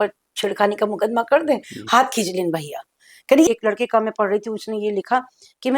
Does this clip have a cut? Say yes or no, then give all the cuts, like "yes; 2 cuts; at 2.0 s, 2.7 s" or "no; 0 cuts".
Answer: yes; 1 cut; at 3.5 s